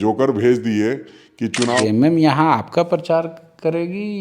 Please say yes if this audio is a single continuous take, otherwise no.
no